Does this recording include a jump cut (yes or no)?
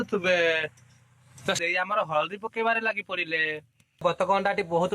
yes